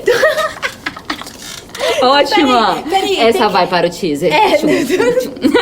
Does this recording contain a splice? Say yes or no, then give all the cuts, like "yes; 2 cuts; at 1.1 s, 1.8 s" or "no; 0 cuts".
no; 0 cuts